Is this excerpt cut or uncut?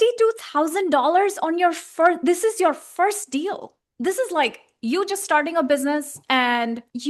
uncut